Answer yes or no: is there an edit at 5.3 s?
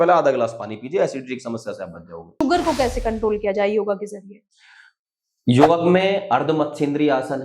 no